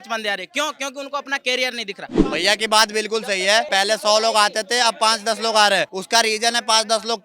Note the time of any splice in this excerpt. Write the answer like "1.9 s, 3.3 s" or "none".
2.2 s, 3.7 s, 6.0 s

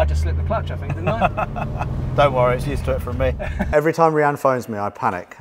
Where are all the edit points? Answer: 3.7 s

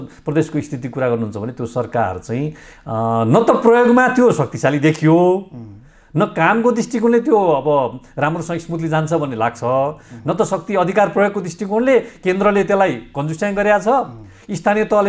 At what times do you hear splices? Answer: none

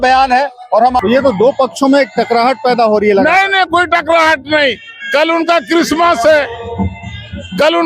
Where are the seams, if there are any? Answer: 1.0 s

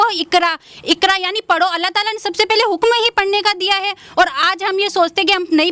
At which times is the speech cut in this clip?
none

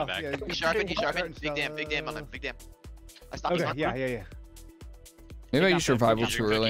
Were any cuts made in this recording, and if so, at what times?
none

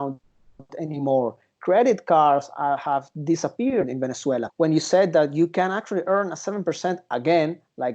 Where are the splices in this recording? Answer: 4.5 s

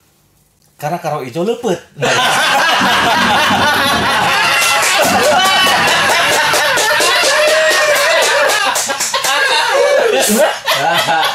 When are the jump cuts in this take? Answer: none

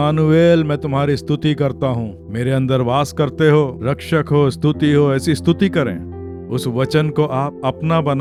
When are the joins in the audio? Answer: none

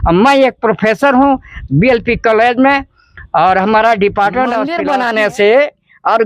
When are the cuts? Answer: 4.7 s

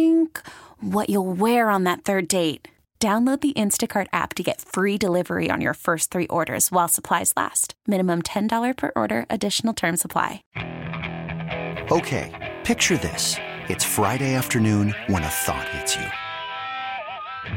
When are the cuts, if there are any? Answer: 10.4 s

